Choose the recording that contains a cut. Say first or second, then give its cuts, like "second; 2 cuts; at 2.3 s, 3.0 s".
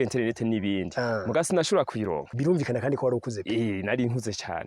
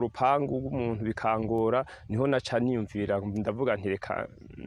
first; 1 cut; at 2.3 s